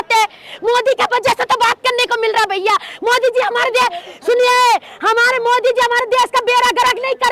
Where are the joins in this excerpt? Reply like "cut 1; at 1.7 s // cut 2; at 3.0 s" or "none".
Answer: none